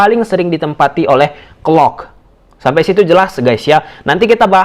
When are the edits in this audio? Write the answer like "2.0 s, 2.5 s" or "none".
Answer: none